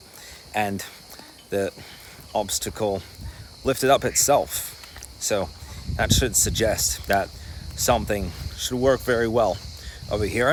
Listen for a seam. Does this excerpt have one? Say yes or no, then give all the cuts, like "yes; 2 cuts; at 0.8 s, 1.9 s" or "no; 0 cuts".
no; 0 cuts